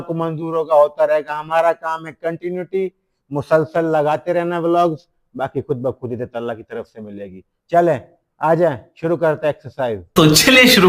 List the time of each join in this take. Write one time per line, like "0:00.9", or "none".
none